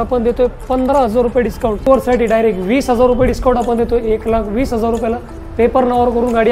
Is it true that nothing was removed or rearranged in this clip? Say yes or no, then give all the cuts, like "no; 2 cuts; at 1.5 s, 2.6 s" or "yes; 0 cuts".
no; 1 cut; at 1.9 s